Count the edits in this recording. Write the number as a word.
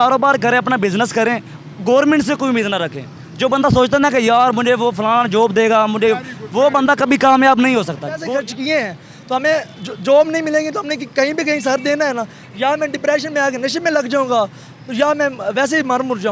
one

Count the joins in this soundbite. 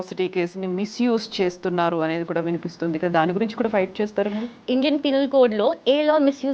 one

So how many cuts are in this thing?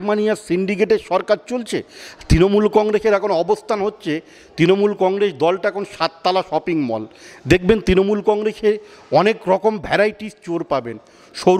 zero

